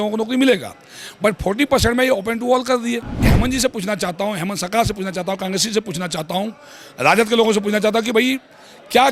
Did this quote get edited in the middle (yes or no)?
yes